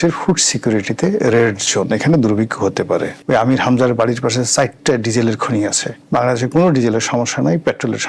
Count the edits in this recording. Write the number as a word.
two